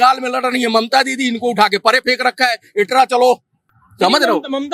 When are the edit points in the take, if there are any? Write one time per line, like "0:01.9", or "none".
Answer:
none